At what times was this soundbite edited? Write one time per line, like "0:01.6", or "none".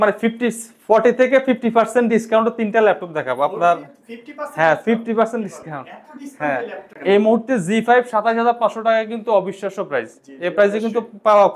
0:06.9